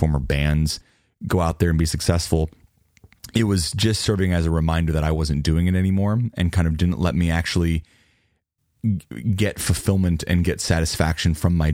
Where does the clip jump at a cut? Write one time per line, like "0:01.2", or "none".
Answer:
none